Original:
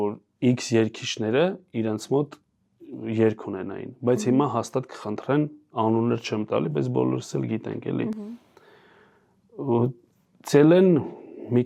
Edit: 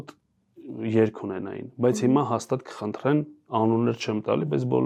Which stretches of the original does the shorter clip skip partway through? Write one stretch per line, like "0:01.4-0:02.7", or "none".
none